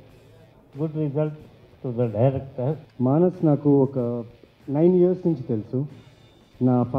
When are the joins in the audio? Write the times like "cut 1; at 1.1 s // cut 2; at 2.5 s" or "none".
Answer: cut 1; at 2.9 s